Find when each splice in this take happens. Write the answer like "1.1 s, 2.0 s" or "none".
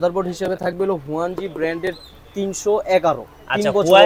none